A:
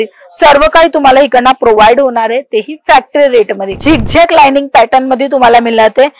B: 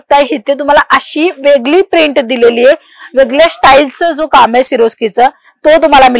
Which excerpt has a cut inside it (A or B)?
A